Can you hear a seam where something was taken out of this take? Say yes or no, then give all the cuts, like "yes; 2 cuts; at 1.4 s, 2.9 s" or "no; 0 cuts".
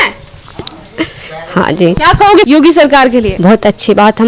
yes; 1 cut; at 2.4 s